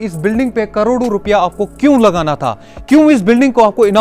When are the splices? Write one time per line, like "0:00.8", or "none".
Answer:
none